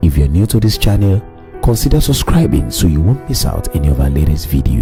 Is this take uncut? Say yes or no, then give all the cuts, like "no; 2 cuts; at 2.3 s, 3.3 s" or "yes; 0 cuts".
yes; 0 cuts